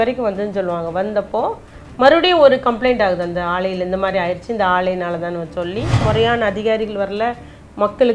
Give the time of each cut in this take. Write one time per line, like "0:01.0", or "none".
0:06.0